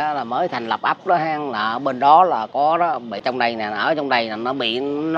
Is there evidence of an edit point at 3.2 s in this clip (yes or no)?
yes